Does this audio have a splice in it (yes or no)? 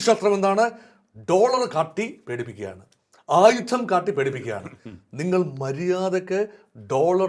no